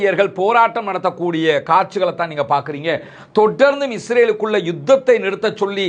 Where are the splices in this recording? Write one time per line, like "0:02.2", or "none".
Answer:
none